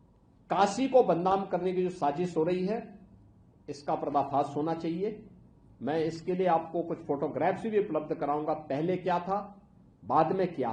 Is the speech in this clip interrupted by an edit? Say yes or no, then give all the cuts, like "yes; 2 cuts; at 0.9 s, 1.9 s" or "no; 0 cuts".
no; 0 cuts